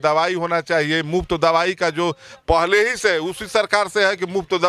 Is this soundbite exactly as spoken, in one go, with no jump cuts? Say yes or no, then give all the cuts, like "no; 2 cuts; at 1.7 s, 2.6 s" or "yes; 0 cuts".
yes; 0 cuts